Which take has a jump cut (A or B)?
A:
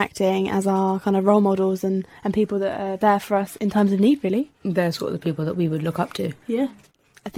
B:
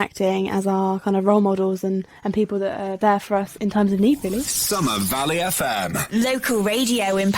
B